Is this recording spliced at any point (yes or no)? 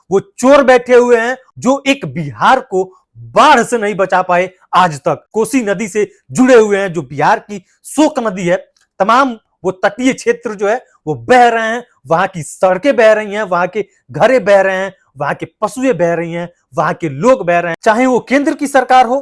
yes